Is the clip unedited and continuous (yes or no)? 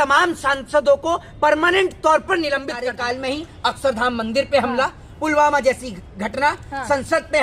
no